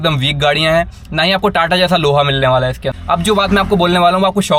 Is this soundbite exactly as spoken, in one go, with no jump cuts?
no; 1 cut; at 2.9 s

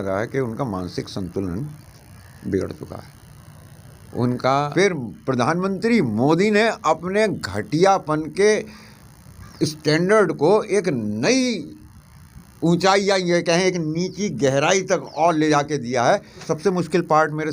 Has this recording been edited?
yes; 2 cuts; at 4.5 s, 16.5 s

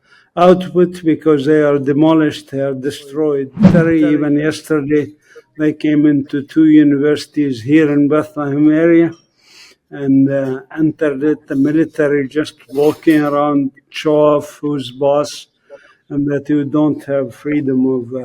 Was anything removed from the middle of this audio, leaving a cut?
yes; 1 cut; at 3.7 s

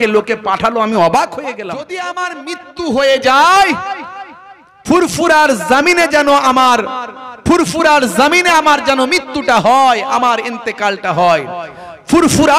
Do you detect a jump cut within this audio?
yes; 1 cut; at 2.1 s

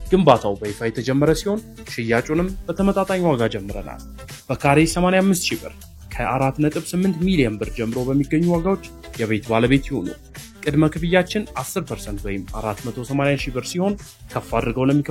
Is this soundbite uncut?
yes; 0 cuts

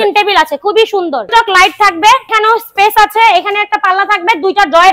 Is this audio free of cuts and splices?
no; 2 cuts; at 1.3 s, 2.3 s

